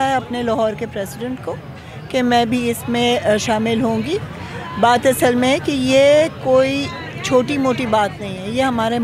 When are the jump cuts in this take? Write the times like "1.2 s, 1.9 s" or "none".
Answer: none